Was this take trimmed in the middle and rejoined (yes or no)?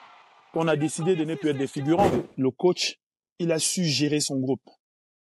yes